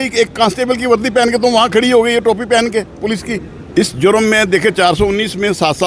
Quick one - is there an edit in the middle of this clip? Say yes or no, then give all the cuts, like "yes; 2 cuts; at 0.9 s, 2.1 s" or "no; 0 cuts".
yes; 1 cut; at 3.5 s